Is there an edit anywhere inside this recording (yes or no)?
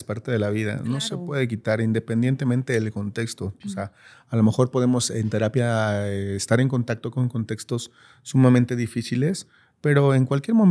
no